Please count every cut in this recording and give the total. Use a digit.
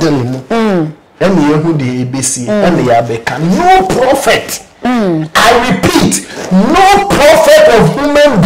0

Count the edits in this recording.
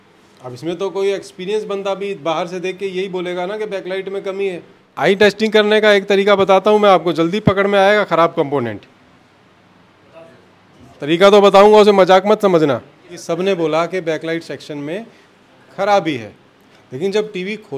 2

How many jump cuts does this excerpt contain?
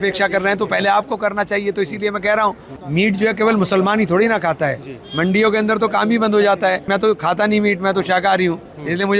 2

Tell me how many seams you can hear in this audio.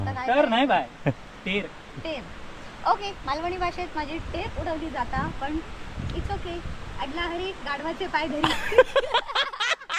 0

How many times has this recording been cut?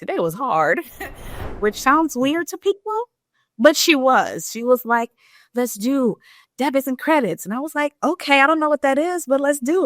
1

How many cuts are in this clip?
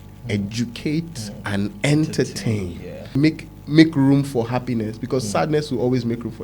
1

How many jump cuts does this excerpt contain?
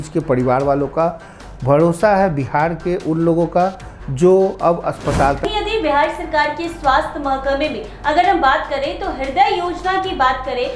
1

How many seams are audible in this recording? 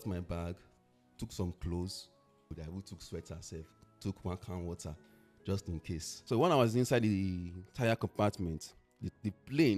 2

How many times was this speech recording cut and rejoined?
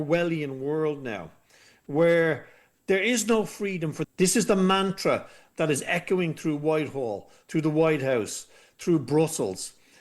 1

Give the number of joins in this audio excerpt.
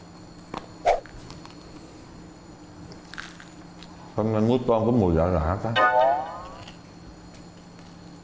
1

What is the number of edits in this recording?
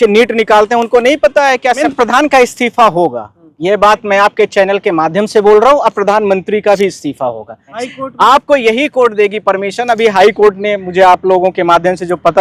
2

